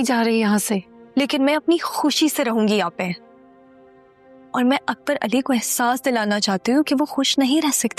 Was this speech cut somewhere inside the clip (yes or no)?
no